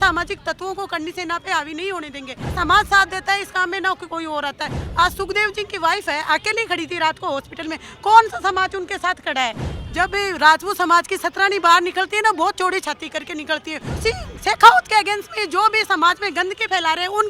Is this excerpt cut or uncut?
cut